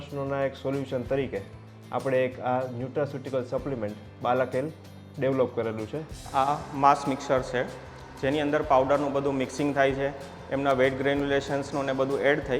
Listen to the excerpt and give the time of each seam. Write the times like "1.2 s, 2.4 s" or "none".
6.2 s